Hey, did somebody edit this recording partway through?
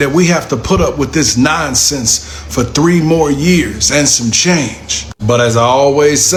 no; 0 cuts

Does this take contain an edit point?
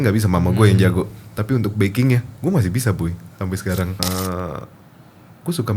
yes; 1 cut; at 4.0 s

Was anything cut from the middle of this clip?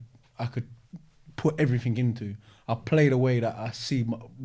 no; 0 cuts

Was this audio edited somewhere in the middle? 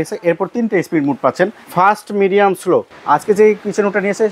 yes; 2 cuts; at 1.6 s, 2.9 s

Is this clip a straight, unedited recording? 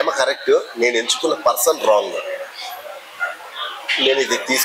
yes; 0 cuts

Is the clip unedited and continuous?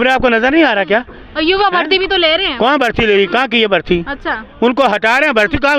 yes; 0 cuts

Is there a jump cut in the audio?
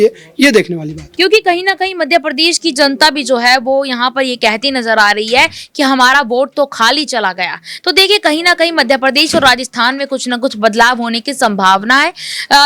yes; 1 cut; at 1.0 s

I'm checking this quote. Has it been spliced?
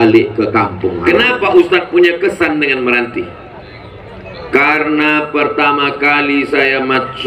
yes; 1 cut; at 1.0 s

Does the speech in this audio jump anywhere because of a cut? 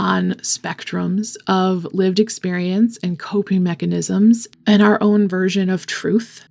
yes; 1 cut; at 4.5 s

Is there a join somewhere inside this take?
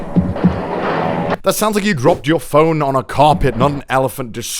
yes; 1 cut; at 1.4 s

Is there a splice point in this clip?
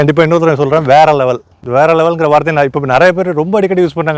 no; 0 cuts

